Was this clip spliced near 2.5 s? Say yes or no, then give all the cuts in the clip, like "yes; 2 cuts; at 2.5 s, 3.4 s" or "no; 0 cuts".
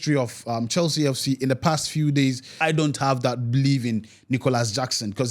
yes; 1 cut; at 2.5 s